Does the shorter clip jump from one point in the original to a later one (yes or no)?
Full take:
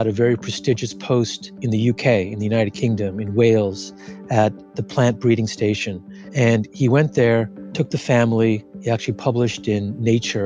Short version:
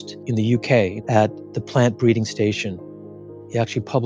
yes